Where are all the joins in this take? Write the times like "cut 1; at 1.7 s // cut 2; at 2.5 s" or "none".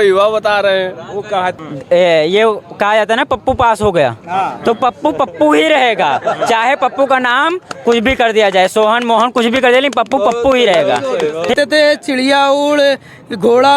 cut 1; at 1.6 s // cut 2; at 11.5 s